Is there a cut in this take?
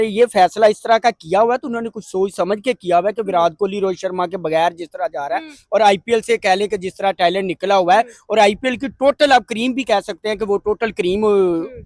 no; 0 cuts

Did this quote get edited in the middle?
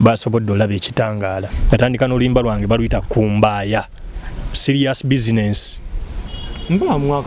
yes; 1 cut; at 1.5 s

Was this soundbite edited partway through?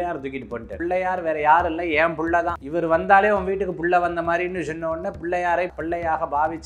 yes; 3 cuts; at 0.8 s, 2.6 s, 5.8 s

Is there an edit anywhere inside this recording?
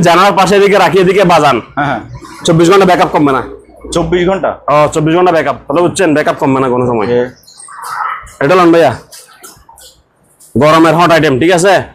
no; 0 cuts

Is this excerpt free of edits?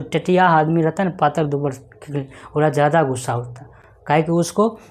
yes; 0 cuts

